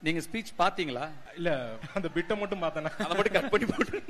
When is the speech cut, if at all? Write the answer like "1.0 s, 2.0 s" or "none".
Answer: 1.2 s, 1.8 s